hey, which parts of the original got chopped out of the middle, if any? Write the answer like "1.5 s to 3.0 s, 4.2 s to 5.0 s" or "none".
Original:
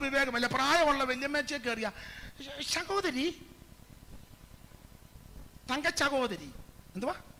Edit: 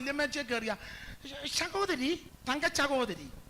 3.5 s to 5.5 s

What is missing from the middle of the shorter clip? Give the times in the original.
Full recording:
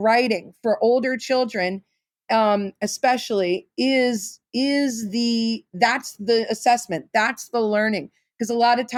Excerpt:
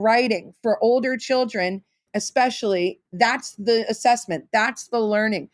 2.1 s to 2.8 s, 3.7 s to 5.6 s

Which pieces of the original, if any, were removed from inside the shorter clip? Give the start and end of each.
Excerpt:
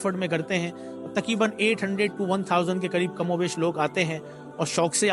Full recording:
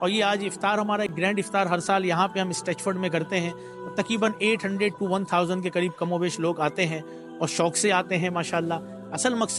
none

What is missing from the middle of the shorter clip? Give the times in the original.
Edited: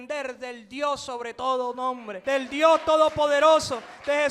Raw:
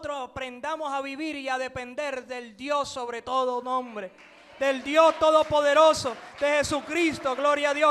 4.0 s to 4.4 s

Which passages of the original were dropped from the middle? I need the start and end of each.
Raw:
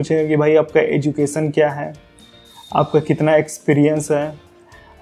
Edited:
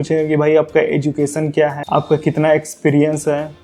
1.8 s to 2.6 s

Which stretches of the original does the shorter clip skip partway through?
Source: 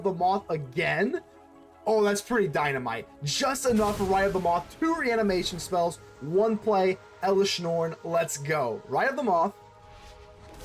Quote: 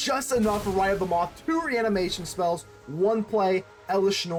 none

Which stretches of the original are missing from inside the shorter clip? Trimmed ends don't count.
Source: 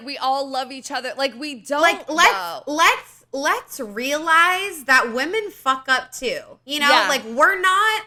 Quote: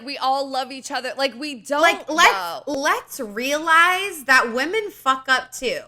2.7 s to 3.3 s

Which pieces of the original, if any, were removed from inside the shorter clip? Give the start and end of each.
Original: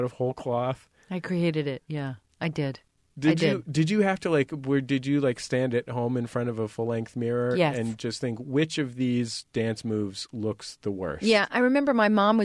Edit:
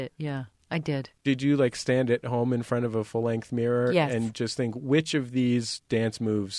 2.9 s to 4.9 s

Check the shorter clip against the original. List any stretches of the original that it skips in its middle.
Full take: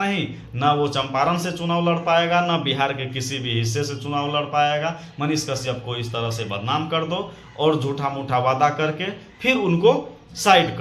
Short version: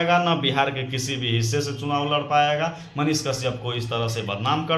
none

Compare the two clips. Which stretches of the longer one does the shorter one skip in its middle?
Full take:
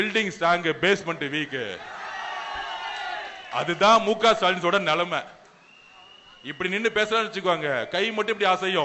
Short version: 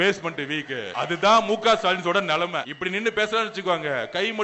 1.7 s to 3.4 s, 5.3 s to 6.5 s

